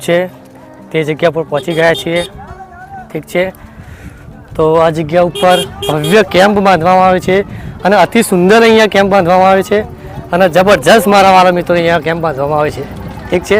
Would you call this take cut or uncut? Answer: uncut